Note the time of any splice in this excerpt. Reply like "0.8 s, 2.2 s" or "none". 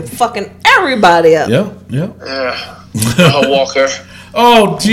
none